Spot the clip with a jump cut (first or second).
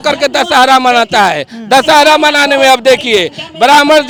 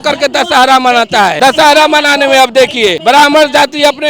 second